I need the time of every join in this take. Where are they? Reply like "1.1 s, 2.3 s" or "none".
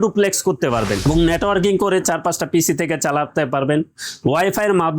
1.0 s